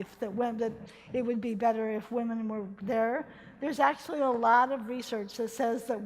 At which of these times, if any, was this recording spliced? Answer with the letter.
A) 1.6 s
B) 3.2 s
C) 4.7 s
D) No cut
C